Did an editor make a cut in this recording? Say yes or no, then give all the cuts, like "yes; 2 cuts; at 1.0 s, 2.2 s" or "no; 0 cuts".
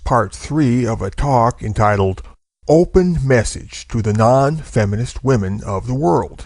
no; 0 cuts